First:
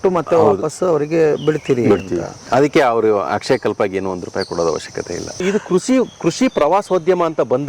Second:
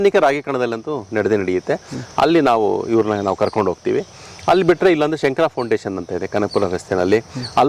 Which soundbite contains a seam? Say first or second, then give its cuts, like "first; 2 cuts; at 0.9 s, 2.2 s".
first; 1 cut; at 5.4 s